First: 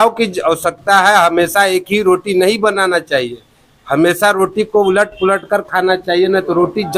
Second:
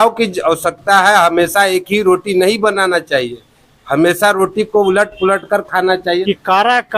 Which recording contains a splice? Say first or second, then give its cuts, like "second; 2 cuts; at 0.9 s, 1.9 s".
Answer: second; 1 cut; at 6.0 s